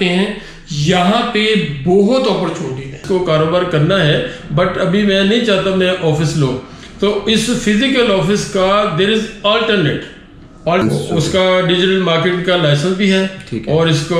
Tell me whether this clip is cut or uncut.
cut